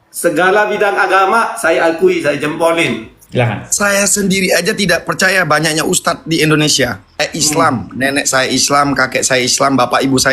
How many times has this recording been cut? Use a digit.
2